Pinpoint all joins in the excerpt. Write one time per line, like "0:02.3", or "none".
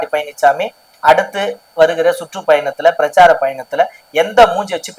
none